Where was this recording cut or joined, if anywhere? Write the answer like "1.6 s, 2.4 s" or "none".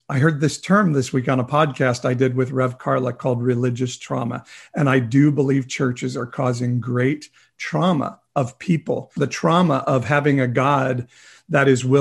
9.1 s